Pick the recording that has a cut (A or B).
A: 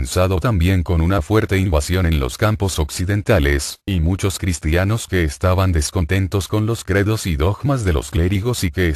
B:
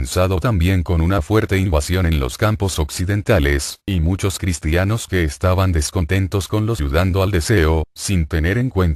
A